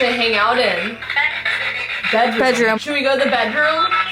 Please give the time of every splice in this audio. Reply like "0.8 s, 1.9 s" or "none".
1.1 s, 2.8 s